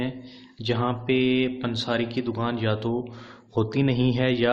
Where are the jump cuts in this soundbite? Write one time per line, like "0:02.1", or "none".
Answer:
none